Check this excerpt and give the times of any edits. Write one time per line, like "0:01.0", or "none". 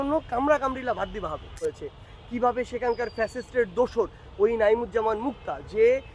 0:01.6